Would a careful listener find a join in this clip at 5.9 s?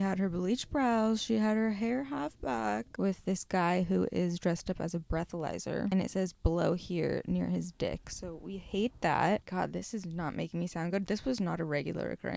yes; 3 cuts; at 2.9 s, 5.9 s, 9.5 s

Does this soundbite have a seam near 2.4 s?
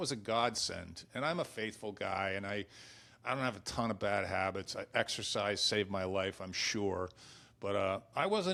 no; 0 cuts

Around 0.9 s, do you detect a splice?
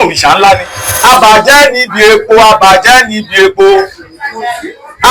yes; 1 cut; at 0.9 s

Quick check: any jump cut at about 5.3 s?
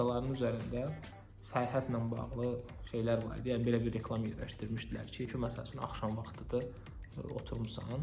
yes; 1 cut; at 5.3 s

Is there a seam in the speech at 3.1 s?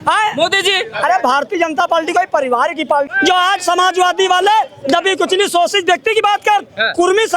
yes; 1 cut; at 3.1 s

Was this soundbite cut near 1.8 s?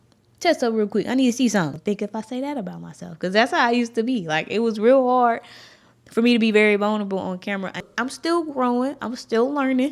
yes; 2 cuts; at 1.8 s, 7.8 s

